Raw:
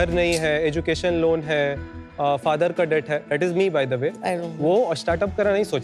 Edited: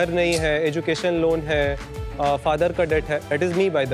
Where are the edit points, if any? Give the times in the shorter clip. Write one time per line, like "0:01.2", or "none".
none